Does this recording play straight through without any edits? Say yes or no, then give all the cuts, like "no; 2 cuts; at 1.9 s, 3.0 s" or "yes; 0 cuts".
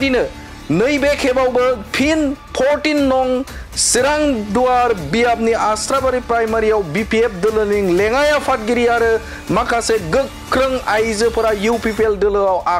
yes; 0 cuts